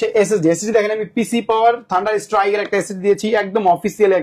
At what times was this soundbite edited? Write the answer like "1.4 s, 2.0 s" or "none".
none